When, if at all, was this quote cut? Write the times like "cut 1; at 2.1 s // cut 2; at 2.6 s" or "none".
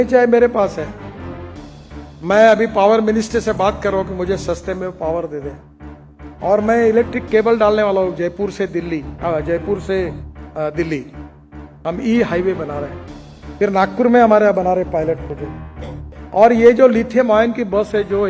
none